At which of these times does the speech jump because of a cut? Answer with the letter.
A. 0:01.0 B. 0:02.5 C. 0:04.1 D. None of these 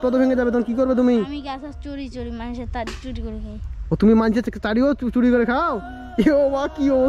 D